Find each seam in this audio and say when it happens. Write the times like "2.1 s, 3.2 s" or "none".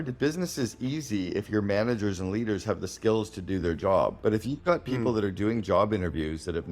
4.2 s